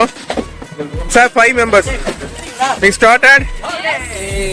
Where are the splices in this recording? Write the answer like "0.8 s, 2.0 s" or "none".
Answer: 2.5 s